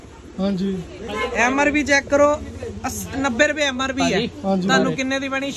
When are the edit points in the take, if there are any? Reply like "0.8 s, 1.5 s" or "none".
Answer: none